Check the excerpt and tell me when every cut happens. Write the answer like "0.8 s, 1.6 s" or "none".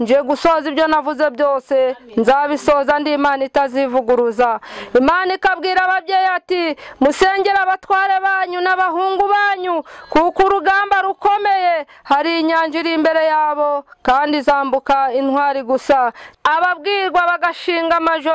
16.3 s